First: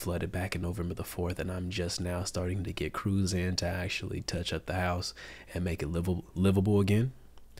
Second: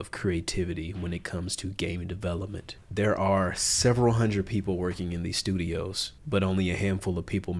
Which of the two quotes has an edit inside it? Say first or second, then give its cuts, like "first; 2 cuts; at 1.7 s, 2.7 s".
second; 2 cuts; at 2.8 s, 6.1 s